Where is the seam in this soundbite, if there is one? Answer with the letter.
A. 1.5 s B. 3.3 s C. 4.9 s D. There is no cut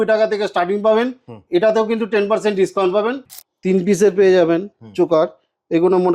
B